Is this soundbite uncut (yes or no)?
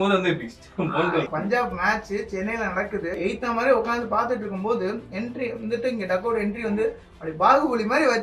no